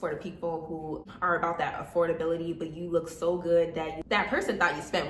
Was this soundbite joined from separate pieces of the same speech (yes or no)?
yes